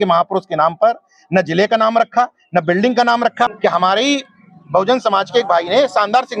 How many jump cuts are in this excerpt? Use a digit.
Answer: 1